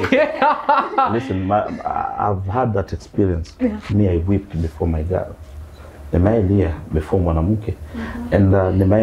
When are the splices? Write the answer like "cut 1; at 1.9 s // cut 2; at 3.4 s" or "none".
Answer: none